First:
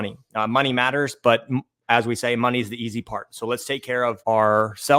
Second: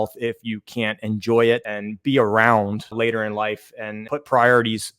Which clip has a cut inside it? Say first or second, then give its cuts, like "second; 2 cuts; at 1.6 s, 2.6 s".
second; 3 cuts; at 1.6 s, 2.9 s, 4.0 s